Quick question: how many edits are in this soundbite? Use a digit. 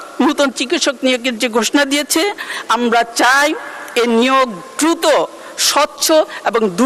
0